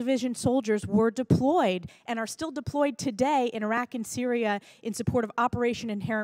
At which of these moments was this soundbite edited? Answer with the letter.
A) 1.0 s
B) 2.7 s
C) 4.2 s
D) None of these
B